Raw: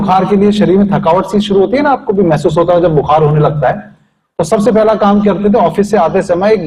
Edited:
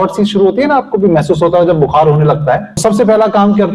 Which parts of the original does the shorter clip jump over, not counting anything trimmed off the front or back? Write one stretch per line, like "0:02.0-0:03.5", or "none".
0:03.9-0:04.4